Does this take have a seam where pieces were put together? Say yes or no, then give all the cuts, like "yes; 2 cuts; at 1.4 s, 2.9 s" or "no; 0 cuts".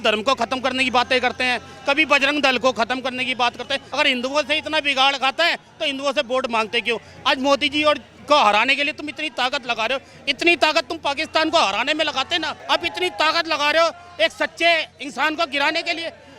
yes; 2 cuts; at 3.8 s, 12.5 s